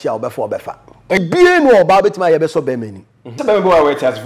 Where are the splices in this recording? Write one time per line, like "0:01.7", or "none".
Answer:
0:01.2
0:03.3